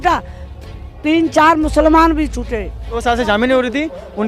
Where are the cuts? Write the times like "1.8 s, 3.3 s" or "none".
3.0 s